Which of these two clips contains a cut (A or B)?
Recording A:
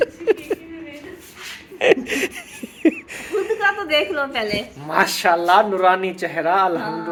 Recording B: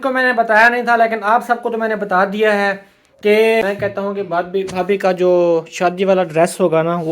B